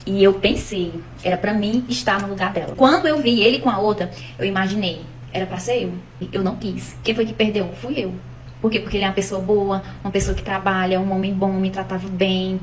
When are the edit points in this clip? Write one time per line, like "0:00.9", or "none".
0:02.7
0:06.2